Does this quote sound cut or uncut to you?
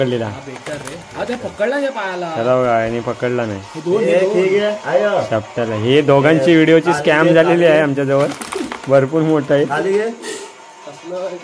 uncut